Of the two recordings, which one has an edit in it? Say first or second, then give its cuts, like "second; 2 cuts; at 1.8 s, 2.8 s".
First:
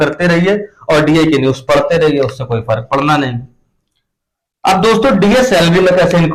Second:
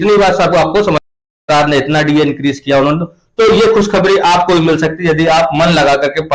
second; 1 cut; at 1.4 s